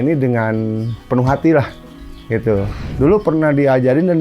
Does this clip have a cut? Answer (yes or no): yes